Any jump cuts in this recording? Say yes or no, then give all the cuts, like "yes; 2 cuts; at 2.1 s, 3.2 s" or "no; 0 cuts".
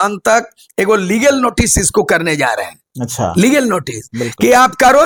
no; 0 cuts